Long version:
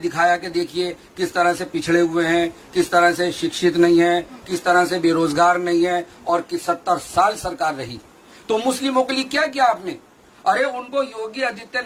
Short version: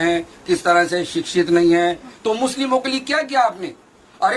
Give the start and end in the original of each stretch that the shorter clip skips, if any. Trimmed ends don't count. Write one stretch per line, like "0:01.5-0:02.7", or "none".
0:04.3-0:08.3